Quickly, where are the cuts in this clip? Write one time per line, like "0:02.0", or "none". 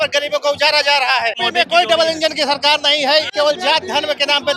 0:01.4
0:03.3